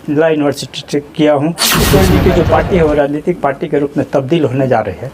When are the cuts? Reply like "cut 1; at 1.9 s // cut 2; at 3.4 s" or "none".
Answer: cut 1; at 1.8 s